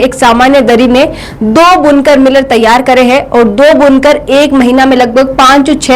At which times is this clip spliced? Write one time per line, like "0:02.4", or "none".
none